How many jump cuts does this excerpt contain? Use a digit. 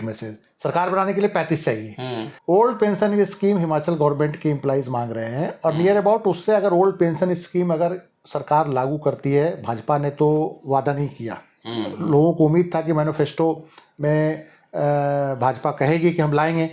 1